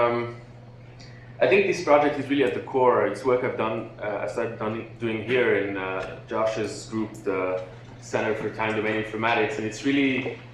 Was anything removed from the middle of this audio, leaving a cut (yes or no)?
yes